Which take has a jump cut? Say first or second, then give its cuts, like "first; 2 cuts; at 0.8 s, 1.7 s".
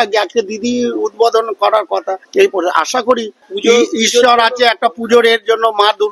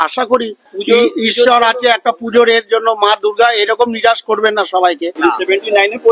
second; 1 cut; at 5.1 s